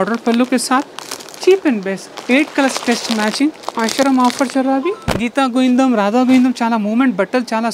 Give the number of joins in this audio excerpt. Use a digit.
3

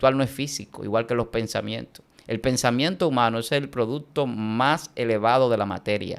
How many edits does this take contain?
0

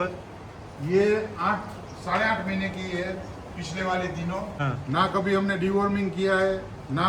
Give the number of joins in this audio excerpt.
1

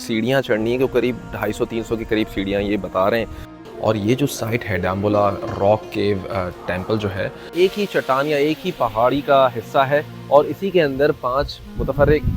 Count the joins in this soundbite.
2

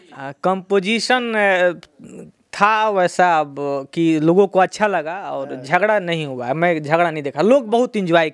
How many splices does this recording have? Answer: 0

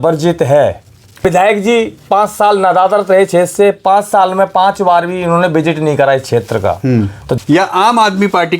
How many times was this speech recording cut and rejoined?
2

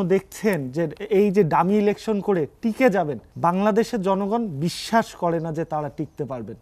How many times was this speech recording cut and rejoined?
1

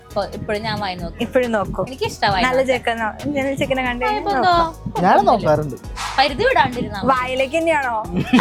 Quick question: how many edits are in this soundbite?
0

